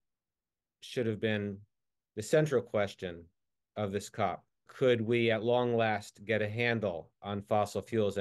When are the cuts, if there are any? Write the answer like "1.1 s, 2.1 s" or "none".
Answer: none